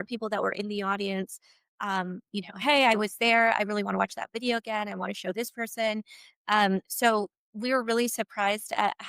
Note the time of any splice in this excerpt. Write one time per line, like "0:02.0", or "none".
none